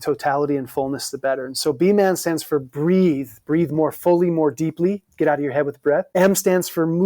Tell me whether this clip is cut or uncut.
cut